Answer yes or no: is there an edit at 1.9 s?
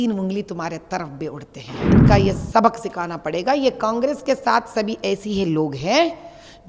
yes